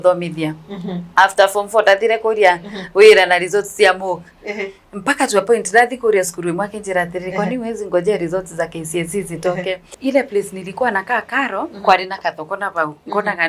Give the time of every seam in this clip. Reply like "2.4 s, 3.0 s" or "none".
9.9 s